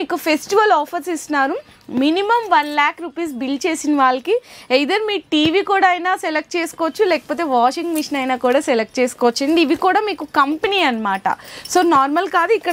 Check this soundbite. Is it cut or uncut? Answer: uncut